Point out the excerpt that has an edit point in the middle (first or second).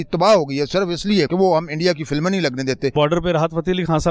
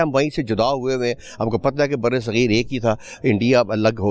first